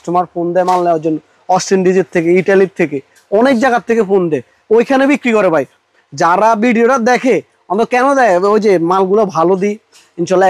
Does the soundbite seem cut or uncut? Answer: uncut